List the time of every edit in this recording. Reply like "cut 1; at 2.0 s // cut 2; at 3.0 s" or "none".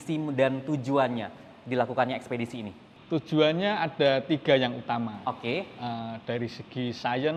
none